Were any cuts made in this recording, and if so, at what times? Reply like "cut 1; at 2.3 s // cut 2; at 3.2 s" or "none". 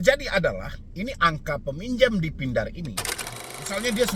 cut 1; at 3.3 s